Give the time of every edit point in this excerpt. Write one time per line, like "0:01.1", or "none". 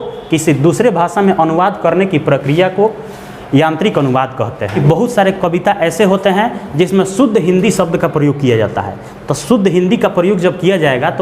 0:04.7